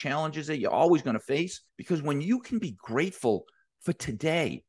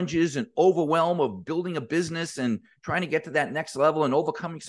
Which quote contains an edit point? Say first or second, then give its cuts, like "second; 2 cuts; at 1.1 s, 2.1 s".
first; 1 cut; at 1.7 s